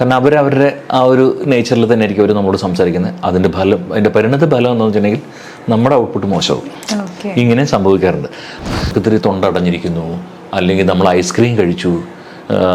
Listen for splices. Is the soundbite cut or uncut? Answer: cut